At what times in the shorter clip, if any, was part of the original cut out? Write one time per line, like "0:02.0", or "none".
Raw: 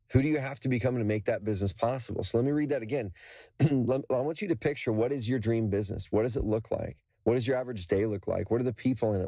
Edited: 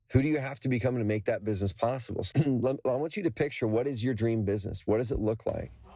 0:02.1

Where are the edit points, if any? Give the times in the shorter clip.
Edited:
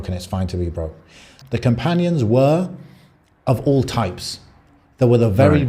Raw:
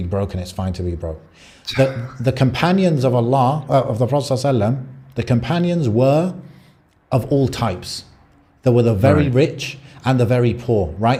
0:01.3

